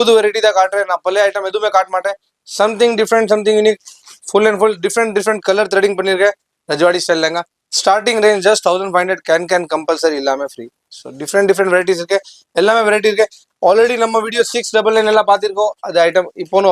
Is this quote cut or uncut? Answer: uncut